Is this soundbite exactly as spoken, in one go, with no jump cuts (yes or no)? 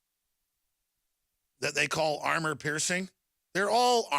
no